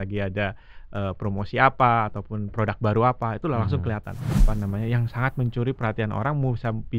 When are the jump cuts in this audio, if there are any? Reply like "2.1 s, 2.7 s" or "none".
4.3 s